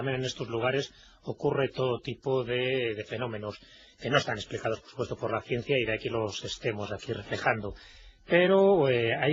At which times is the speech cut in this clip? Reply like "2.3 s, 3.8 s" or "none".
5.0 s